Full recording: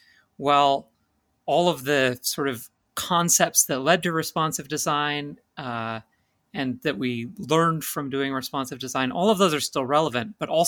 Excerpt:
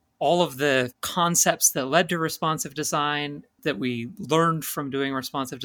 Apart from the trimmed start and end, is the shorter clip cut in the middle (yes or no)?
yes